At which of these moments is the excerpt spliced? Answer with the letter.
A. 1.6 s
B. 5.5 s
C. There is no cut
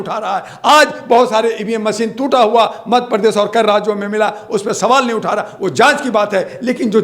C